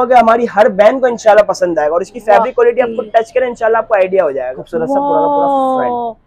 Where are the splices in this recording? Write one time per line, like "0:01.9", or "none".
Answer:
0:04.6